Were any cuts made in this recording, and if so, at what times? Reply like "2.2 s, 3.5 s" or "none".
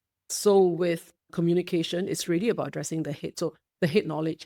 3.3 s